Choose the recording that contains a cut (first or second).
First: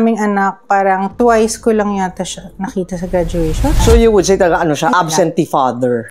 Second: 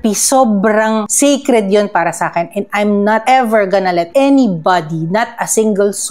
first